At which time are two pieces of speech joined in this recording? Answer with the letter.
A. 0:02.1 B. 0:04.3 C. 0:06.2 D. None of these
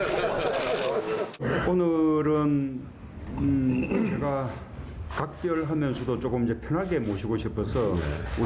C